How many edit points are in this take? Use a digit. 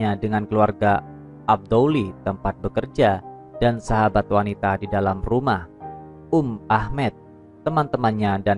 0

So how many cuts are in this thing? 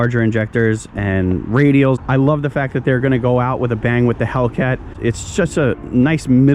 2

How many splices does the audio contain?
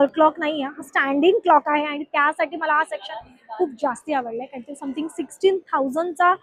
0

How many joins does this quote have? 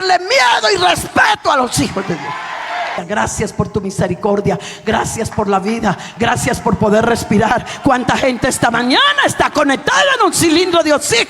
1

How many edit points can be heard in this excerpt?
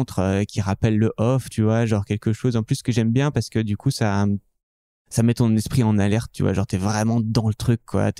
0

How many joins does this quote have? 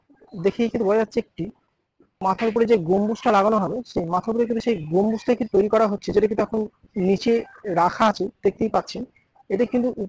1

